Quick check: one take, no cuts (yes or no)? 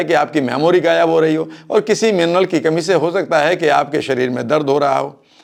yes